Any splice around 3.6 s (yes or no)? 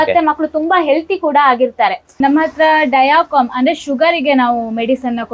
no